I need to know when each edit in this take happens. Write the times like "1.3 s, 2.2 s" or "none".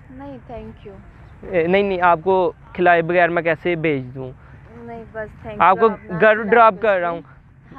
none